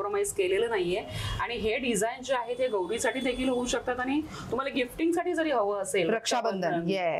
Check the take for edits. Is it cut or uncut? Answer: uncut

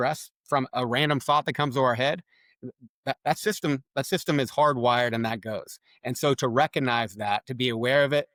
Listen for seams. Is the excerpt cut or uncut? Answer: uncut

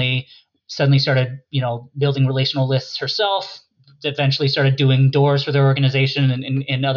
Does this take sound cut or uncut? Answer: uncut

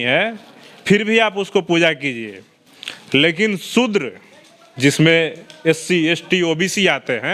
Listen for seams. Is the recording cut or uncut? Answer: uncut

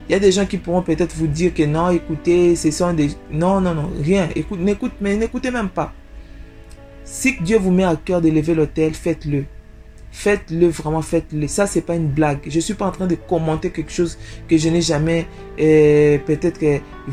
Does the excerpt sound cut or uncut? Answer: uncut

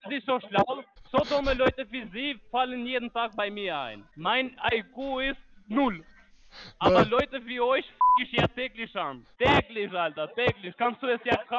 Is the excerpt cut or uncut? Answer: cut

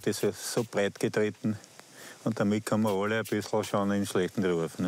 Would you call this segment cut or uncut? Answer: uncut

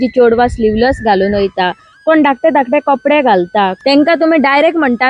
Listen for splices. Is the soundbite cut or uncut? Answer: cut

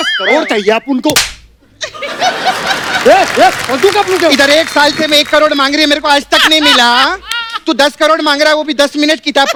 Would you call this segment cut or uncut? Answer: uncut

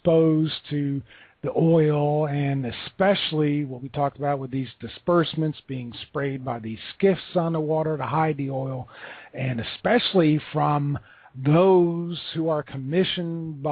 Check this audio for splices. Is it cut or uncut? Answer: cut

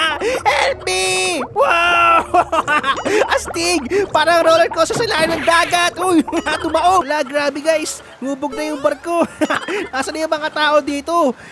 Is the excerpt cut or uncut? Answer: cut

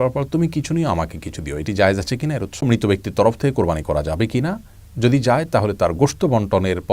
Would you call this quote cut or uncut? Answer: cut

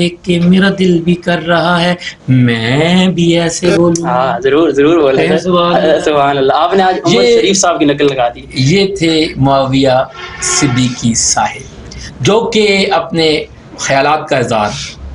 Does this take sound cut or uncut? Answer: uncut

